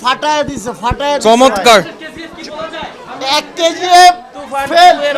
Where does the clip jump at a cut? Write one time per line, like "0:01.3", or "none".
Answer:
none